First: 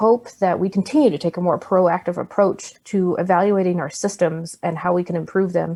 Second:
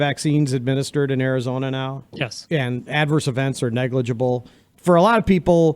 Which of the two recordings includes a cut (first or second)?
second